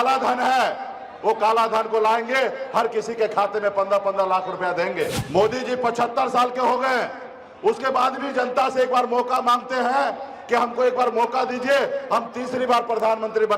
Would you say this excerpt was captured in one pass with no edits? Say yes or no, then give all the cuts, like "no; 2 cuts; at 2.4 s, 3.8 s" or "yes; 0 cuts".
no; 1 cut; at 5.2 s